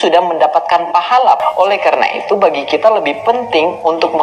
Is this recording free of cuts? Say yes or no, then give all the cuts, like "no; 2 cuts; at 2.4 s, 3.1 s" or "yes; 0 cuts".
no; 1 cut; at 1.4 s